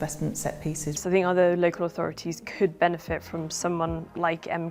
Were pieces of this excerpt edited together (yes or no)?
yes